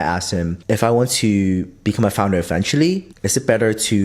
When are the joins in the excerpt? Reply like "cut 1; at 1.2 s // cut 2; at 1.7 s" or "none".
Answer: cut 1; at 3.1 s